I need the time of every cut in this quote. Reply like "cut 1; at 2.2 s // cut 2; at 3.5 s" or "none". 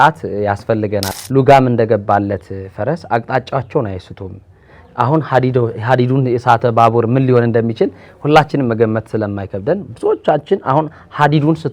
cut 1; at 1.1 s